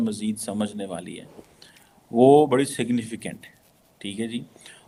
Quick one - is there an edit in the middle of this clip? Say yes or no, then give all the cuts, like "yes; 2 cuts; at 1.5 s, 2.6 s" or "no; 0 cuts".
no; 0 cuts